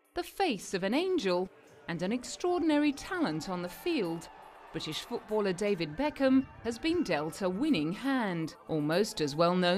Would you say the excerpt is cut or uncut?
uncut